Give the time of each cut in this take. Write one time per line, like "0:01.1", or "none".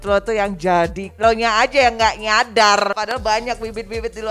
0:01.1
0:02.9